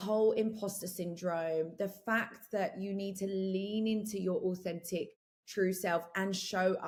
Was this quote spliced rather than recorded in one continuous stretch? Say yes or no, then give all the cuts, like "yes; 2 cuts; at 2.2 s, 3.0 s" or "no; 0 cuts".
no; 0 cuts